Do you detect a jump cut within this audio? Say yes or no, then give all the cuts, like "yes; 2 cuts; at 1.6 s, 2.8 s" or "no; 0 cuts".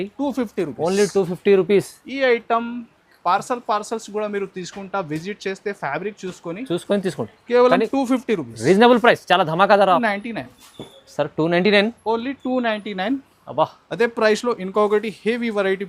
yes; 1 cut; at 10.0 s